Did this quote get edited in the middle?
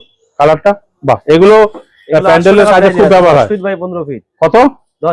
no; 0 cuts

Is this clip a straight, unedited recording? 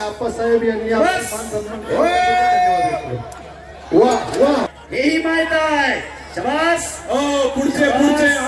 no; 1 cut; at 4.7 s

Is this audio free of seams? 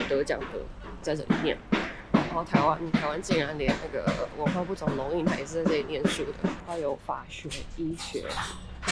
no; 2 cuts; at 1.0 s, 6.6 s

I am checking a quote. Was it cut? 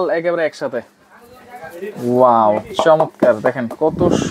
no; 0 cuts

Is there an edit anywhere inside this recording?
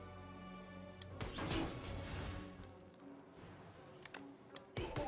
no; 0 cuts

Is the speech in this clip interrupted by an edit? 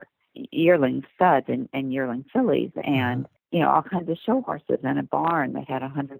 yes; 1 cut; at 3.3 s

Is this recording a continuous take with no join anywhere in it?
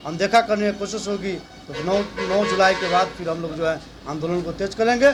yes; 0 cuts

